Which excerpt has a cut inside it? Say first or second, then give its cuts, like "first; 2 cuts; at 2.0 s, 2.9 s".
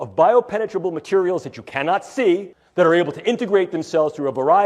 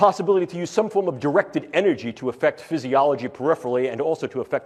first; 1 cut; at 2.6 s